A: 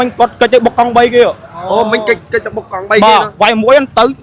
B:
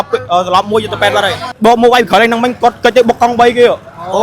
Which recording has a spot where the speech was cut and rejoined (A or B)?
B